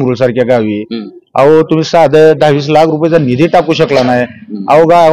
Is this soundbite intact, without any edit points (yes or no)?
yes